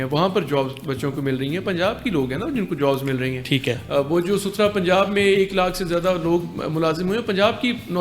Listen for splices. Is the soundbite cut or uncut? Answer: uncut